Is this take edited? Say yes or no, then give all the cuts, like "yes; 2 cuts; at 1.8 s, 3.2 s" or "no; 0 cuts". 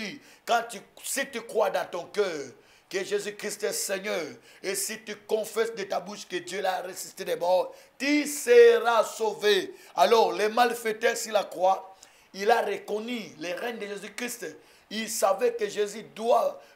no; 0 cuts